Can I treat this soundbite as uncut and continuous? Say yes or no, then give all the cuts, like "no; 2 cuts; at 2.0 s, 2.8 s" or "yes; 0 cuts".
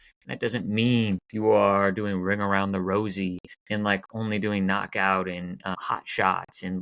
no; 3 cuts; at 1.3 s, 3.5 s, 5.8 s